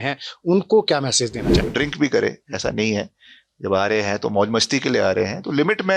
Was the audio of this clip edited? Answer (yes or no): yes